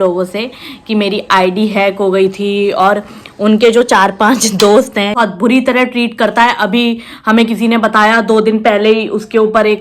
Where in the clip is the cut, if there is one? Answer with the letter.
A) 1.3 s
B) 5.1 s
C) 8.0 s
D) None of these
B